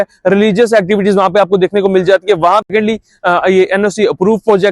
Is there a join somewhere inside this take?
yes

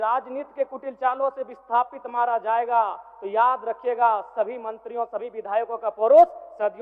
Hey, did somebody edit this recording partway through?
no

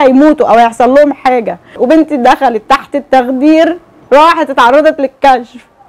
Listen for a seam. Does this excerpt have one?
yes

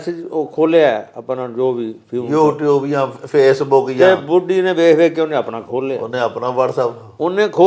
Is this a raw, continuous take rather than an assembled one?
yes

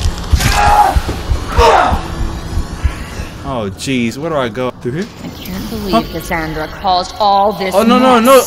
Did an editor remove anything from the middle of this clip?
yes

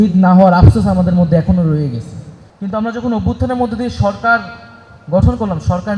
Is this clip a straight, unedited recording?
yes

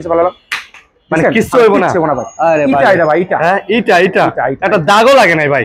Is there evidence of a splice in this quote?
no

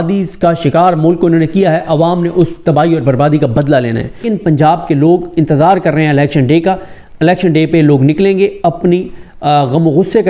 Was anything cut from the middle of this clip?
yes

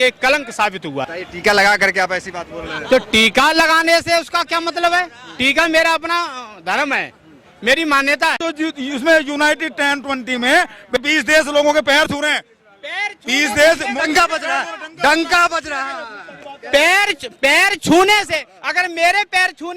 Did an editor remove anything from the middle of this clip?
yes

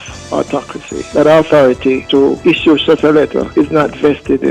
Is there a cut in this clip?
yes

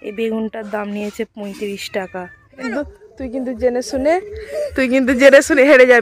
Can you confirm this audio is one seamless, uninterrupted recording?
no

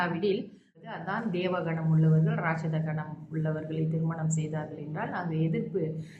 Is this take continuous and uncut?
no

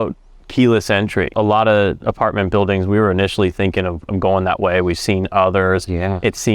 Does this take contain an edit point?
yes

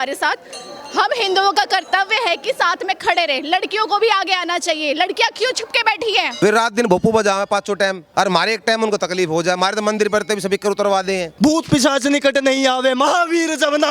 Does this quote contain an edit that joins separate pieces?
yes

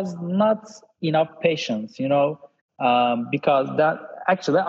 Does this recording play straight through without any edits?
yes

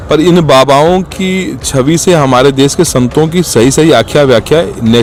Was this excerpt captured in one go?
yes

